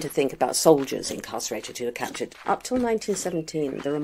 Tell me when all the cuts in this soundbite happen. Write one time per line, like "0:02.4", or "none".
0:02.4

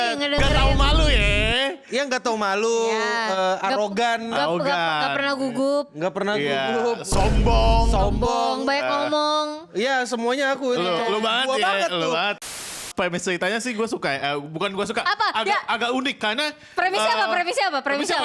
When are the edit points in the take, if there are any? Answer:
0:12.7

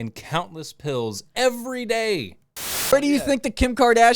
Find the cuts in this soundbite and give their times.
0:02.9

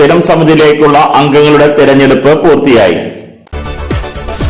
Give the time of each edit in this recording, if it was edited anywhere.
none

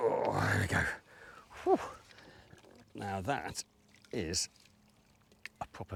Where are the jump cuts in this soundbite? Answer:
none

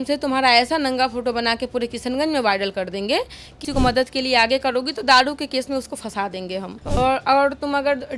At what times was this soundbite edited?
0:03.5
0:06.8

